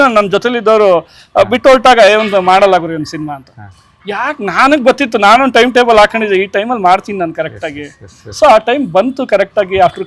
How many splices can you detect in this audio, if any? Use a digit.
0